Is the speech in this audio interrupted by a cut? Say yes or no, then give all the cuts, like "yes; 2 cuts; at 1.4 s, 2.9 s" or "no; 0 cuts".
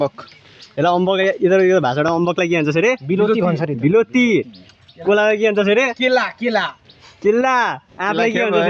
no; 0 cuts